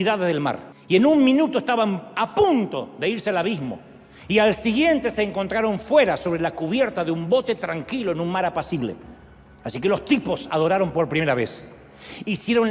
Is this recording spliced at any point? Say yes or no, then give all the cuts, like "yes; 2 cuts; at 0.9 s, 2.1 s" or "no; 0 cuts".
no; 0 cuts